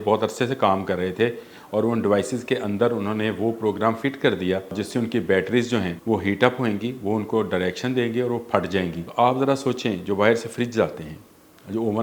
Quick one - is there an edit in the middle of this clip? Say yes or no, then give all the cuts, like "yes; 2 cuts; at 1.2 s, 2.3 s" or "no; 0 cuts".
yes; 3 cuts; at 4.7 s, 5.9 s, 9.0 s